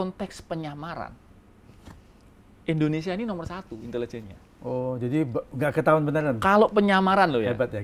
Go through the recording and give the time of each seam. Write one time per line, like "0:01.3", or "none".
none